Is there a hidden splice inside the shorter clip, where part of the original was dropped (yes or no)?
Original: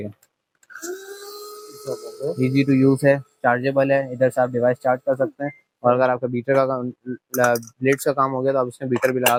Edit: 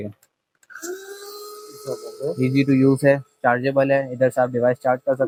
no